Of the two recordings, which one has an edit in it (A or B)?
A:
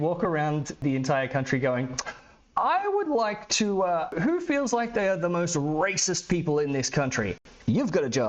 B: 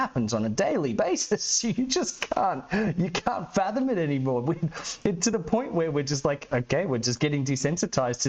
A